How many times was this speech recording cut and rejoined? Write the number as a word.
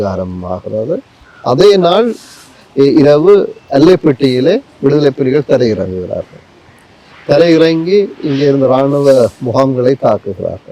zero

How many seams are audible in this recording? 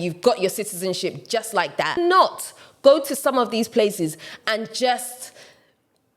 one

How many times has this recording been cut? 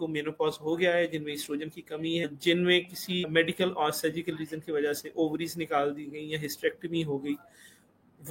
zero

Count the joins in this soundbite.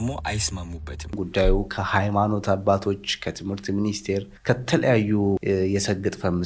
two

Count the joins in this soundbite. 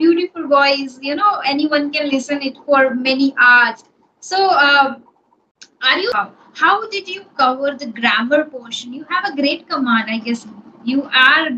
one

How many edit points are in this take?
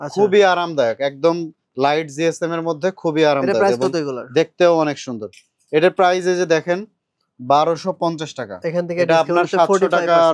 zero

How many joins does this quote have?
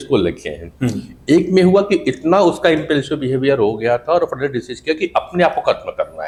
zero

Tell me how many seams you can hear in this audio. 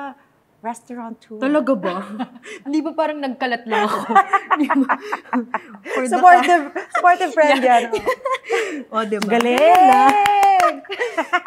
zero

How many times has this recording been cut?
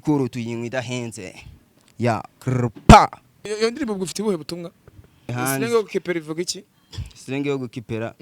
two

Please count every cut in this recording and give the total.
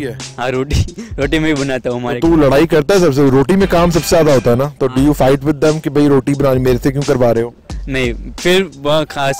zero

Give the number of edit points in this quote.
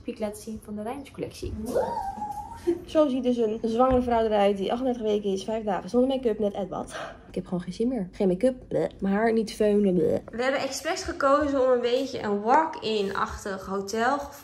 four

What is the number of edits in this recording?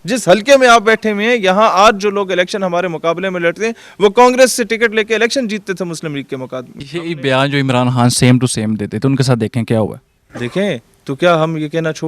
one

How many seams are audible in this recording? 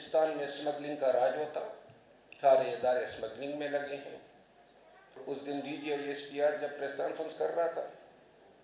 one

